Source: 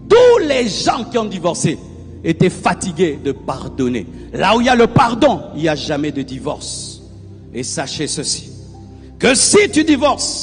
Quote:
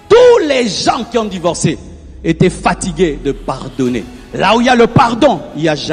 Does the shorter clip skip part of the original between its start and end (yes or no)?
no